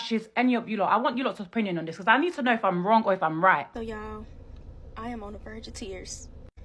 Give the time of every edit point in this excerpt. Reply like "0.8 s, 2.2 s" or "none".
3.7 s